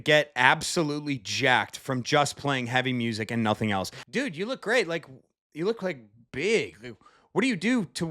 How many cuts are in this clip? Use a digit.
1